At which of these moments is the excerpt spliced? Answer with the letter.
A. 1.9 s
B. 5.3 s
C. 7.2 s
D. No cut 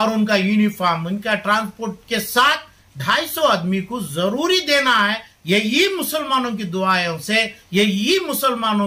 B